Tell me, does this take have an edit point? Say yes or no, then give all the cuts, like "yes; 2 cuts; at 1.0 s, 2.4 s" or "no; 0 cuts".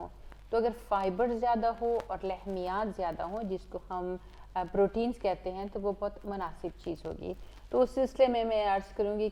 no; 0 cuts